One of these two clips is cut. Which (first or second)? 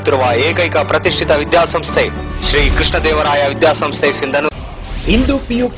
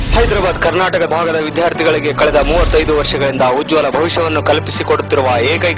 first